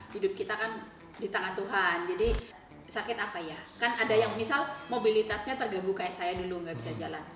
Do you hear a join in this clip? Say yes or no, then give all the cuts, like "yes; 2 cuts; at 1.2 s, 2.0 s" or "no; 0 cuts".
yes; 1 cut; at 2.5 s